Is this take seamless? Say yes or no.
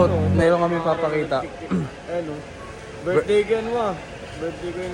yes